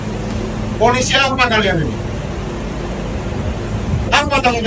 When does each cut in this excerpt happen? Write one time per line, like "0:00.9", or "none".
none